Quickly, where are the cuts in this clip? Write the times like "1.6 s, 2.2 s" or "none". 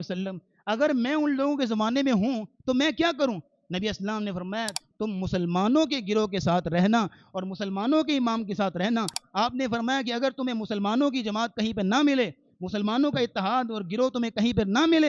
4.8 s, 9.2 s